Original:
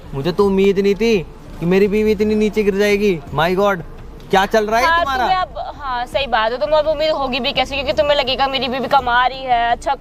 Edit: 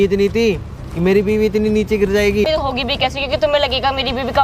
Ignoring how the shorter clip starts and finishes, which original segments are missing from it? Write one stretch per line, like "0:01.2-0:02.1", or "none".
0:03.1-0:07.0